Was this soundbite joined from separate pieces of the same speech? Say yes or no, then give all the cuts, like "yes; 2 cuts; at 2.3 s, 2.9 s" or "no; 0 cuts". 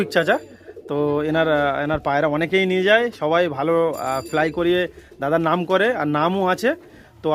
no; 0 cuts